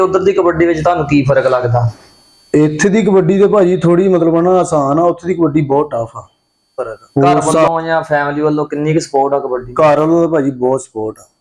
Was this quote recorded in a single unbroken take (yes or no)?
no